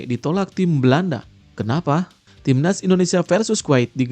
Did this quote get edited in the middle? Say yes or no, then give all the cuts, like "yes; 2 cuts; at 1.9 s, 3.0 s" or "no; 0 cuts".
yes; 1 cut; at 2.3 s